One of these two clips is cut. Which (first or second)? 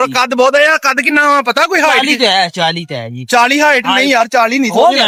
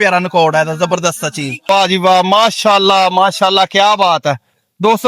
second